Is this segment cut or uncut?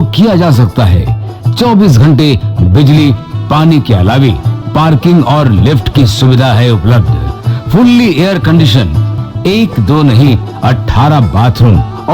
uncut